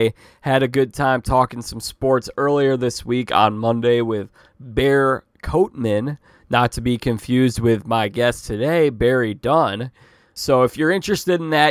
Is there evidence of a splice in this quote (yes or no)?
yes